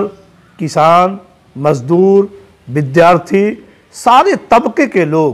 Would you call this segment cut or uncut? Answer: uncut